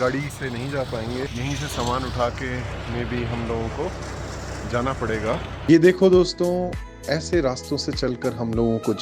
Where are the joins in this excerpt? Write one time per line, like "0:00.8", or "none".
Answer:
0:01.3
0:05.6